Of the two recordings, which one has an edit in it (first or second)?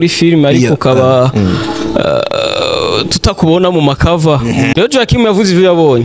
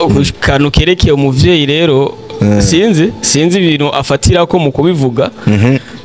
first